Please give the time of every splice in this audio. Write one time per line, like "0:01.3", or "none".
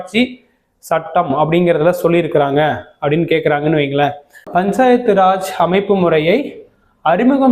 0:04.4